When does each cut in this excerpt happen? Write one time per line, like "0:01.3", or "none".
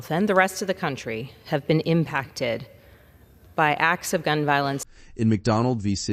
none